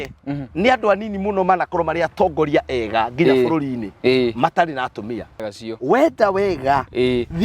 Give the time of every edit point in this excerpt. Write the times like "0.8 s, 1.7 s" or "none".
5.4 s